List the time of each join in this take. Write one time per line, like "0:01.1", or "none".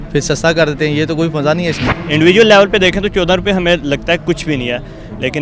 0:02.0